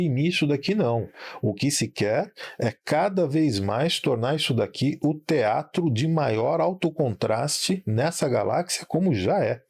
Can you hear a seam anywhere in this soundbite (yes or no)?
yes